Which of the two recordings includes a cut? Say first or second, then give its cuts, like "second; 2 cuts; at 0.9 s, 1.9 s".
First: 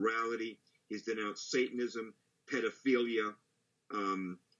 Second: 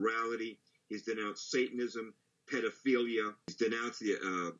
second; 1 cut; at 3.5 s